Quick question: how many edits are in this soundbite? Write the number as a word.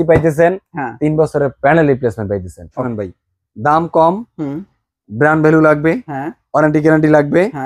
one